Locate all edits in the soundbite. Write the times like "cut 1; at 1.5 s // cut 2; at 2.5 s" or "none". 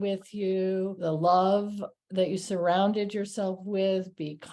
cut 1; at 1.0 s